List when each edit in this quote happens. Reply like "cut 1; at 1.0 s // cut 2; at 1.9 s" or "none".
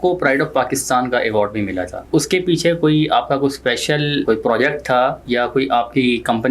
cut 1; at 1.9 s // cut 2; at 4.2 s // cut 3; at 5.2 s

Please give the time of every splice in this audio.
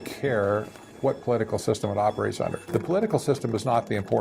cut 1; at 2.6 s

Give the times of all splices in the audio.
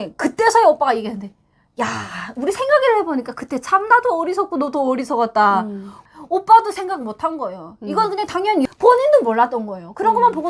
cut 1; at 5.9 s // cut 2; at 8.6 s

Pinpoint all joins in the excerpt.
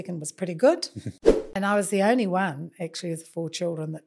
cut 1; at 1.4 s

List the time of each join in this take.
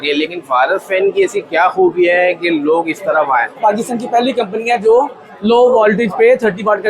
cut 1; at 3.6 s

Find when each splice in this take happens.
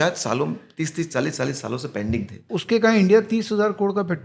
cut 1; at 2.4 s

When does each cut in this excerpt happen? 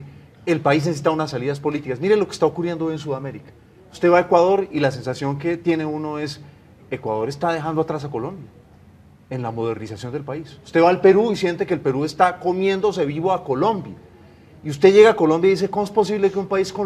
none

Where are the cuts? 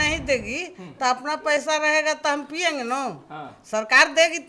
none

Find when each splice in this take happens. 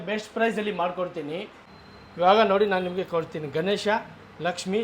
cut 1; at 1.6 s

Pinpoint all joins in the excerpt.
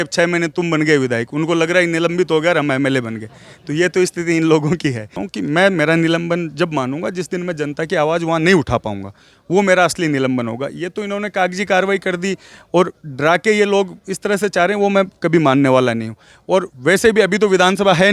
cut 1; at 5.2 s

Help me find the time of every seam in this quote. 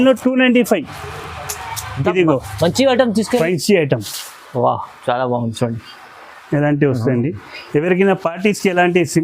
cut 1; at 3.4 s

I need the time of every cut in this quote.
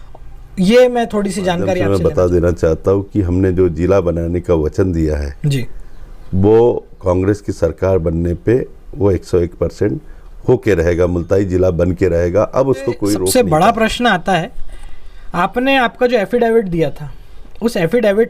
cut 1; at 1.8 s // cut 2; at 13.2 s

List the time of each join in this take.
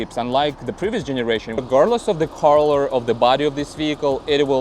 cut 1; at 1.6 s

